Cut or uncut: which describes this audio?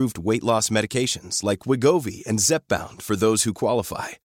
uncut